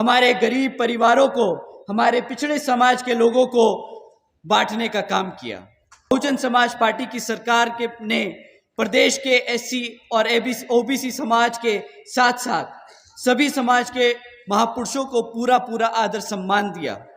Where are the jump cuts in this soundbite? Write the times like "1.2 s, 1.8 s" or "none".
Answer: 6.1 s